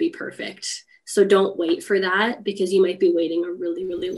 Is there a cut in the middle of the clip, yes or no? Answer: no